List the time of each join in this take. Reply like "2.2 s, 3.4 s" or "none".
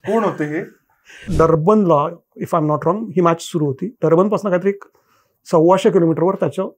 1.2 s